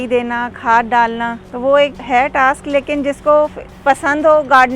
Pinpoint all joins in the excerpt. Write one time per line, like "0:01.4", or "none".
0:01.5
0:02.0
0:03.7